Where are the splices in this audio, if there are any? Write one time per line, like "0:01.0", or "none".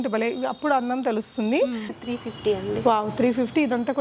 0:01.9